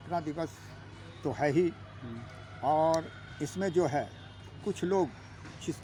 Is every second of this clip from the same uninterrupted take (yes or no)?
yes